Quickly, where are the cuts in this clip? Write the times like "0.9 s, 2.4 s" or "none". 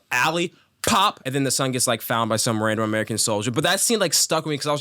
1.2 s